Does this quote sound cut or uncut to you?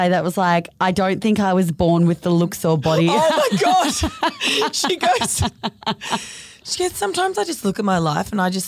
uncut